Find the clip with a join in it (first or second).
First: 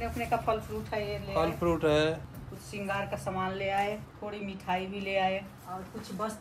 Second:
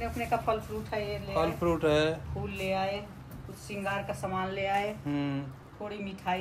first